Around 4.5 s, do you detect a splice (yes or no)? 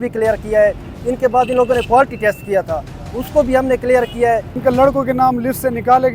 yes